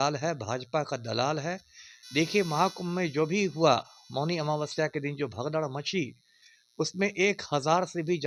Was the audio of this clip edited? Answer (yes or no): no